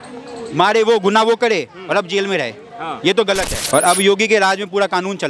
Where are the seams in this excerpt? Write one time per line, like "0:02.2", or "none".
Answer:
0:03.6